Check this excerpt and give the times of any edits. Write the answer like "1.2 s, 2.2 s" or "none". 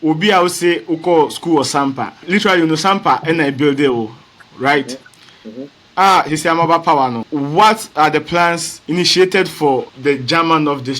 2.2 s, 7.2 s, 8.7 s, 9.9 s